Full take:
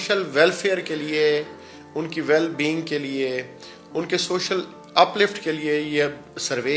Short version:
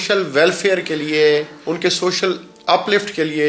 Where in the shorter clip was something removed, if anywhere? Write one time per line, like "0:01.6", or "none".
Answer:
0:01.5